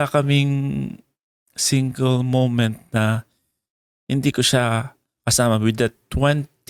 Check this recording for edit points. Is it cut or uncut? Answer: uncut